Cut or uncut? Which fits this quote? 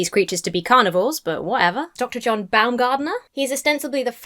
cut